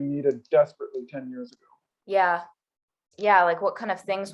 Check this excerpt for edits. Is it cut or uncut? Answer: uncut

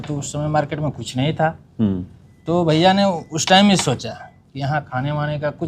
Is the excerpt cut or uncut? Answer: uncut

